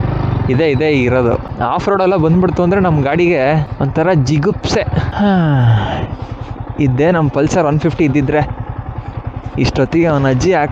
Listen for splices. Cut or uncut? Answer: cut